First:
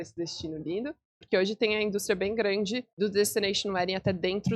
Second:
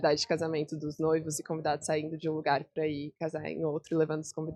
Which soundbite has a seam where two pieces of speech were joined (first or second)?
first